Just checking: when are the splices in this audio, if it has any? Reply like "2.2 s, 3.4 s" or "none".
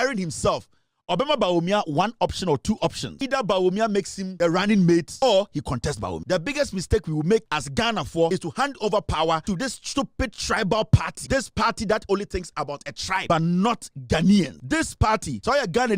3.1 s, 4.2 s, 5.1 s, 6.2 s, 8.0 s, 9.4 s, 11.1 s, 13.2 s, 15.1 s